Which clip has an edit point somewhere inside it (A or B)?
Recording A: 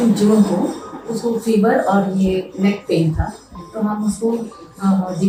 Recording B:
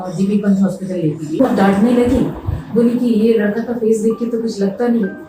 B